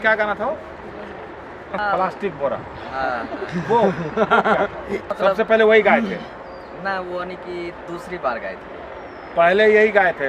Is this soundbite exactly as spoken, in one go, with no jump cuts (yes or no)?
no